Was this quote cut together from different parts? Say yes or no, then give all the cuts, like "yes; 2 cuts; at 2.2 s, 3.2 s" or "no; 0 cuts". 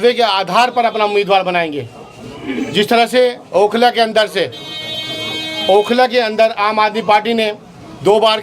no; 0 cuts